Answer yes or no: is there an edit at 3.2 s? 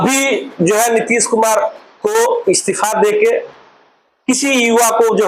no